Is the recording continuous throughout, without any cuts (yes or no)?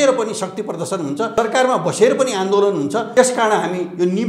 no